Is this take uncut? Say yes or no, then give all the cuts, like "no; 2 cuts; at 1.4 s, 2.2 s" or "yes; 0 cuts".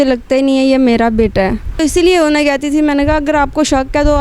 no; 1 cut; at 1.7 s